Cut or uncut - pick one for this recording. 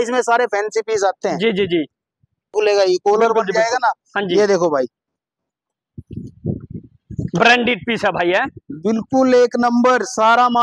cut